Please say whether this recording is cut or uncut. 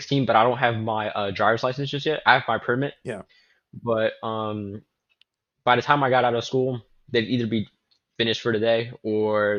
uncut